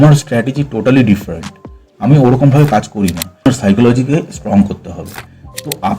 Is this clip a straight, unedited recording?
no; 1 cut; at 3.5 s

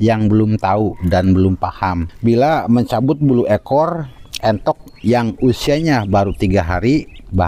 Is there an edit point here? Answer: yes; 1 cut; at 2.1 s

